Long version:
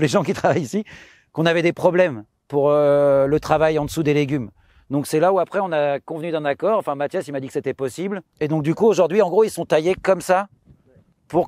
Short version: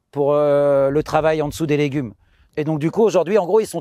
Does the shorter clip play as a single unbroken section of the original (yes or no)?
no